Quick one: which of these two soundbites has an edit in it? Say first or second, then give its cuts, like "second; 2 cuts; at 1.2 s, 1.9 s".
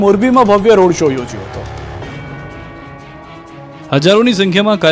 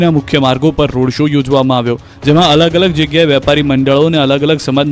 second; 1 cut; at 0.9 s